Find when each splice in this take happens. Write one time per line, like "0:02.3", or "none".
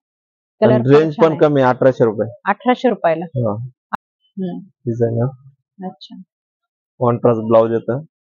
0:03.8